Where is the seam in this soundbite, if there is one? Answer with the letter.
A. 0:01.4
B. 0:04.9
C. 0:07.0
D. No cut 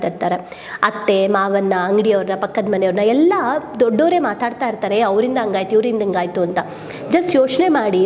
D